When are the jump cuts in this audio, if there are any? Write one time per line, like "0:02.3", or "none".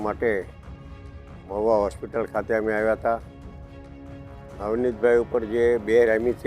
0:03.2
0:04.6